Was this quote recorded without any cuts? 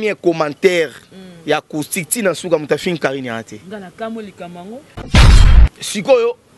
no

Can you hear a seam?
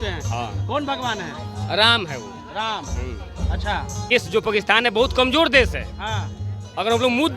yes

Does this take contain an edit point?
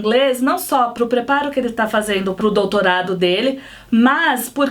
yes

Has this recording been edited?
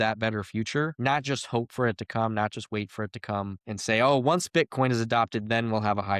yes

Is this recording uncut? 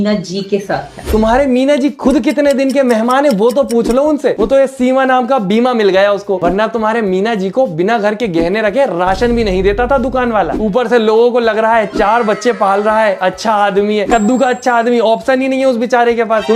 yes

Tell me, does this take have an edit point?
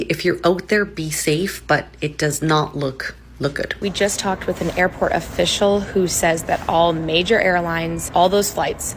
yes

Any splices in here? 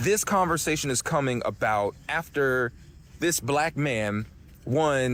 no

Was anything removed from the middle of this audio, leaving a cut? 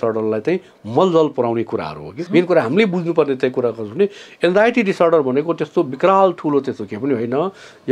yes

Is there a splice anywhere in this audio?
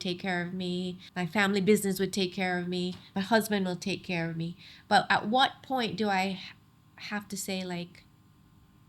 yes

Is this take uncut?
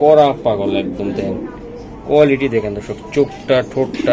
yes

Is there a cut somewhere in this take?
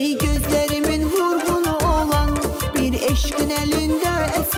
no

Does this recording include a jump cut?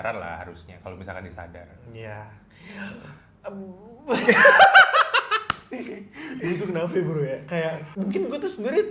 no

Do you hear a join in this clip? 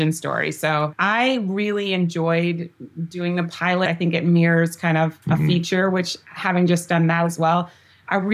yes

